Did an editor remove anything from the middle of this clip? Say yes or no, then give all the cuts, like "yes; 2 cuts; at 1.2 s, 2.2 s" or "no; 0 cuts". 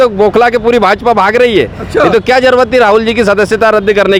no; 0 cuts